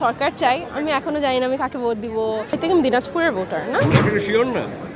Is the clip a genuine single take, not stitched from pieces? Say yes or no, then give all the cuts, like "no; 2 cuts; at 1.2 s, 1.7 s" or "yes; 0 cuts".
no; 1 cut; at 2.5 s